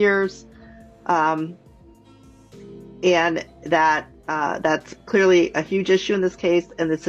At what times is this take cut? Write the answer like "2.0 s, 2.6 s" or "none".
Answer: none